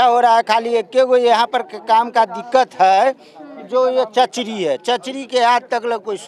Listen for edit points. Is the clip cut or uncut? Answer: uncut